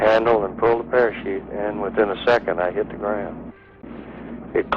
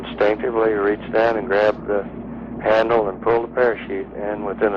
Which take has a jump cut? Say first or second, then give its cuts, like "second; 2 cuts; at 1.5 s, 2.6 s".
first; 1 cut; at 3.8 s